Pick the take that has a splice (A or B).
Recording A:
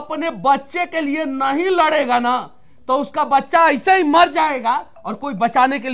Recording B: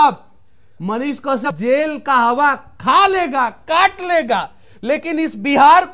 B